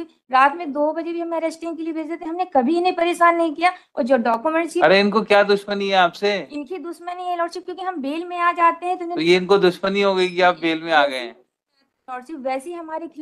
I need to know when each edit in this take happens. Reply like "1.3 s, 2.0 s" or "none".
none